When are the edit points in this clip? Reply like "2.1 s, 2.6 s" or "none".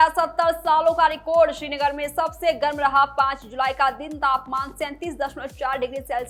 none